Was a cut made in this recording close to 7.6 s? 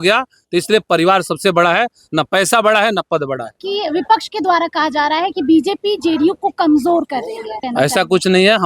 yes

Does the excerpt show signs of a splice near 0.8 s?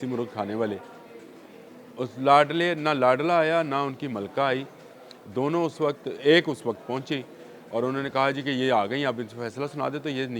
no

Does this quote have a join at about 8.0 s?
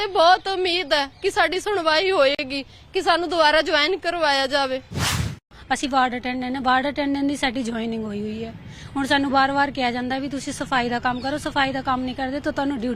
no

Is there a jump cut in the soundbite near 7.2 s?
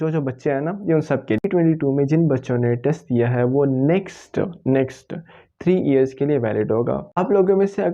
yes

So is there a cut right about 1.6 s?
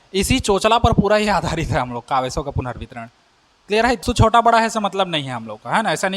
no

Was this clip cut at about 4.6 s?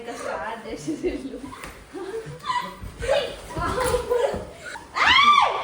yes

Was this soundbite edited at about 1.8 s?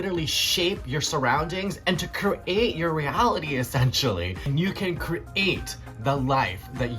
yes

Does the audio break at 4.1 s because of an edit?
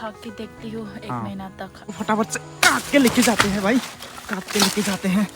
no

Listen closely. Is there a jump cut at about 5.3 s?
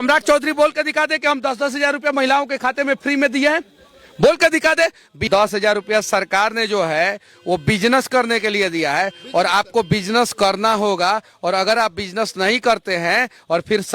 yes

